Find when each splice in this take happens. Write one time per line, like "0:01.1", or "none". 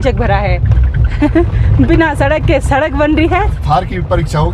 0:03.6